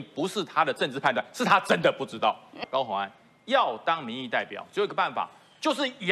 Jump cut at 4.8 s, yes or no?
no